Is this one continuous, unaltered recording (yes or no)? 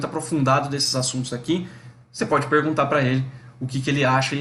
yes